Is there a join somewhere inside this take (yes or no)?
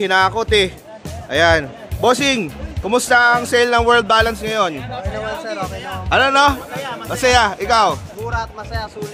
no